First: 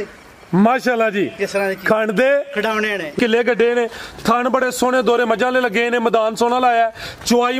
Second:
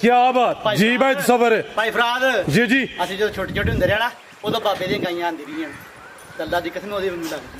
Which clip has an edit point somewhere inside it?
first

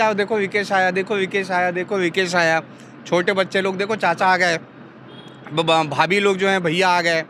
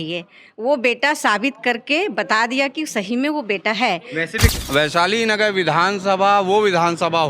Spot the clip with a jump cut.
second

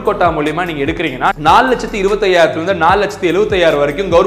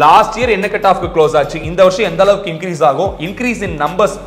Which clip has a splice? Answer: first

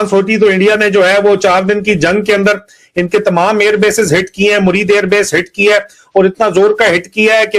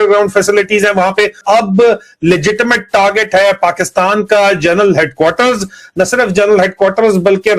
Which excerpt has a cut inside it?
second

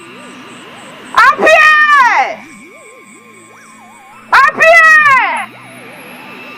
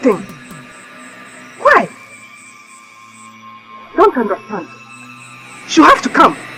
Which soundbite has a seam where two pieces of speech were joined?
first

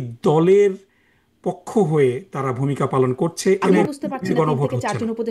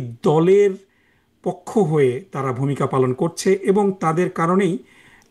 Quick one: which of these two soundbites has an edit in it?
first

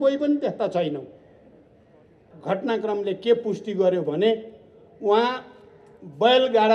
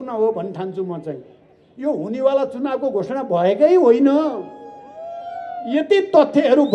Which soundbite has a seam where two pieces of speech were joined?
first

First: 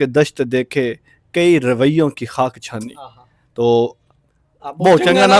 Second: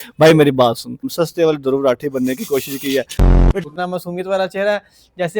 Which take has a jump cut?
second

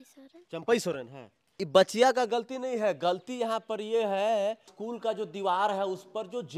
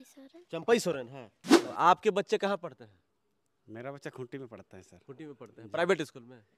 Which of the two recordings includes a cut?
second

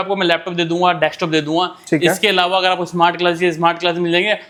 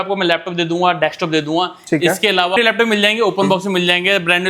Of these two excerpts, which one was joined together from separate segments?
second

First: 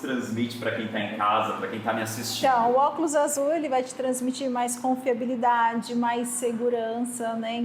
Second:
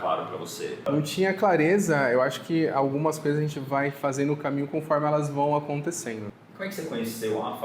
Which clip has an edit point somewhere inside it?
second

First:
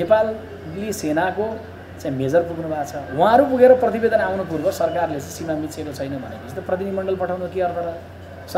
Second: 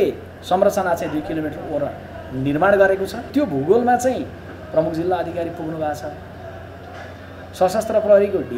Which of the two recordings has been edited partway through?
second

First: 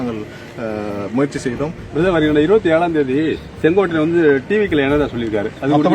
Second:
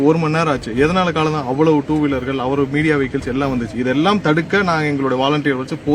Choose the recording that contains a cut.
first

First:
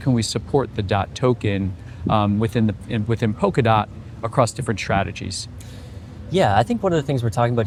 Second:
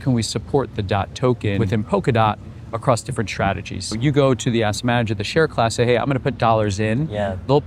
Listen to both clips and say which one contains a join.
second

